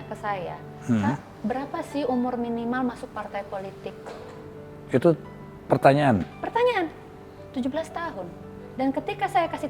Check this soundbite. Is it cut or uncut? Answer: uncut